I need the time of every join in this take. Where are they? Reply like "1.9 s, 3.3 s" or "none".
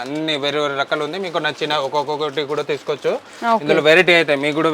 none